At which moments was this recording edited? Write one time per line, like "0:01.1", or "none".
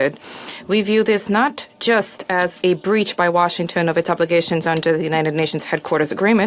none